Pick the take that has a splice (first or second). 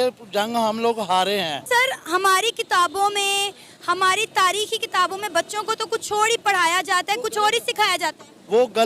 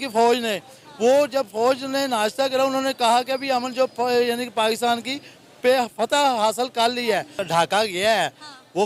second